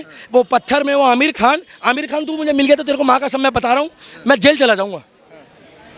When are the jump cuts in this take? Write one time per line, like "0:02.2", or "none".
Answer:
none